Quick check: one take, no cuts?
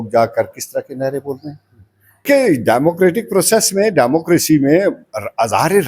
no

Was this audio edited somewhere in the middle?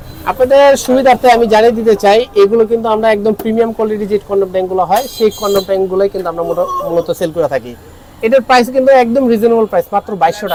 no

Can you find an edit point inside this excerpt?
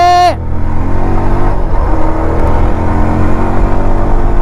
no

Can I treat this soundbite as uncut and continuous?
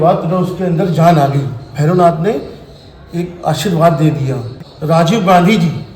yes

